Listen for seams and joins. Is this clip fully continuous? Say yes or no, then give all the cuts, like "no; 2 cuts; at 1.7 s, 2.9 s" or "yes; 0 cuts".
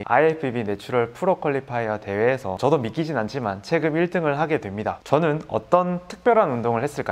no; 2 cuts; at 2.6 s, 5.0 s